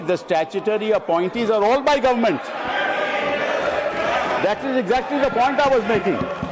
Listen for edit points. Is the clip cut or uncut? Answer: uncut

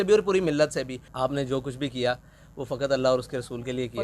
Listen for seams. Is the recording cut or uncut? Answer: cut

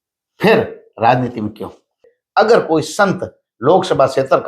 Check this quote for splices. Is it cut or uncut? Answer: cut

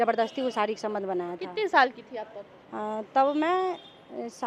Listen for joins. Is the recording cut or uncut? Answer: uncut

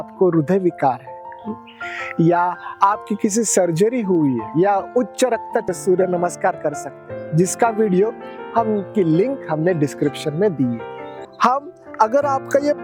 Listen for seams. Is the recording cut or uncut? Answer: cut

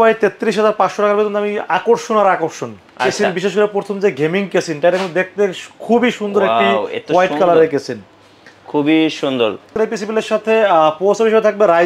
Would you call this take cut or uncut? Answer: cut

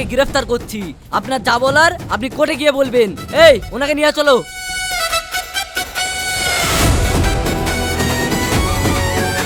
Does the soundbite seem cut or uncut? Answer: uncut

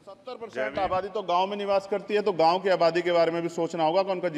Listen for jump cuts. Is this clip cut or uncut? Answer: uncut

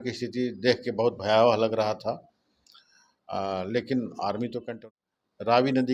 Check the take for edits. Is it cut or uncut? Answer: cut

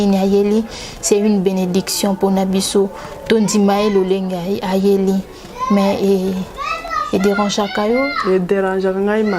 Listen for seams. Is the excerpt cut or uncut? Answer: uncut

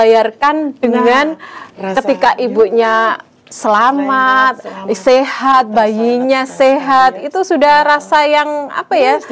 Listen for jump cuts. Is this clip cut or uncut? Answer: uncut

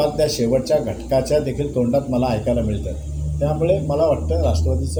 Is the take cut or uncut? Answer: uncut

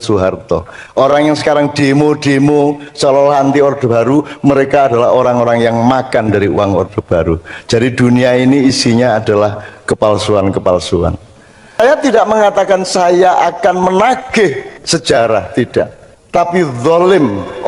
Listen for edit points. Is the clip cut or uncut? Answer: cut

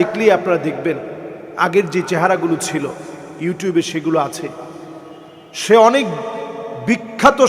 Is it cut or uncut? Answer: uncut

